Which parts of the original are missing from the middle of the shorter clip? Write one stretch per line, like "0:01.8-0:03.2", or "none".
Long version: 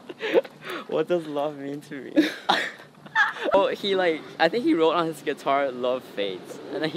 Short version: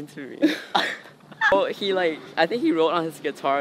0:03.2-0:03.5